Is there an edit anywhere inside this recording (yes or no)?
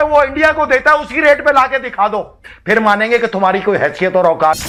no